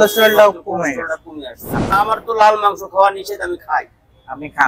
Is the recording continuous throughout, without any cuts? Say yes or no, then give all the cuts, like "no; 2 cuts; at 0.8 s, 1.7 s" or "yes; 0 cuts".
no; 1 cut; at 1.9 s